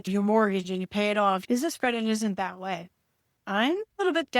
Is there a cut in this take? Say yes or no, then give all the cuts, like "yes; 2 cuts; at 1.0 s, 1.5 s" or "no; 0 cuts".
yes; 2 cuts; at 1.4 s, 3.3 s